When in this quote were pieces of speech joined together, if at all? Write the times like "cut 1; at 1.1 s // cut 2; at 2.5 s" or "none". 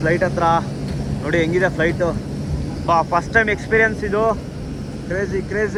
none